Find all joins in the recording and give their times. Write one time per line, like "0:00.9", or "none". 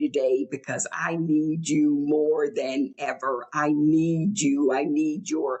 none